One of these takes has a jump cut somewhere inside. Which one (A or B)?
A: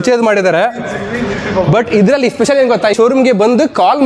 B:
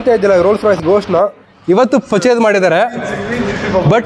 A